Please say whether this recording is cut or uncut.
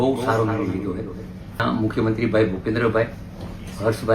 cut